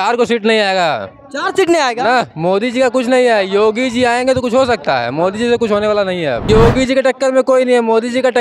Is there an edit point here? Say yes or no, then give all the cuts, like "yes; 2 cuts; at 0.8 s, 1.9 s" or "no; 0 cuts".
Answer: yes; 1 cut; at 6.4 s